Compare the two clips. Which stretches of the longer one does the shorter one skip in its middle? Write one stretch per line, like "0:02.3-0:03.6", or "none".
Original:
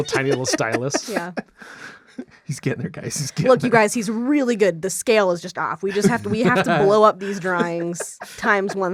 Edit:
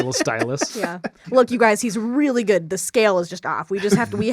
0:01.6-0:03.4